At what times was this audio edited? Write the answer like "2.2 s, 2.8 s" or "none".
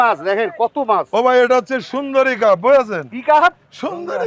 none